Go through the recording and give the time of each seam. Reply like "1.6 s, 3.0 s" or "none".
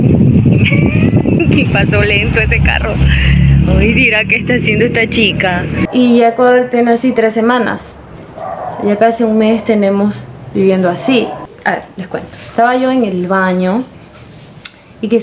5.9 s, 11.4 s